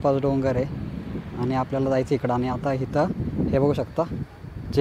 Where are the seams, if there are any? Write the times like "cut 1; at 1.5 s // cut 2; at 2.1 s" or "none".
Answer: none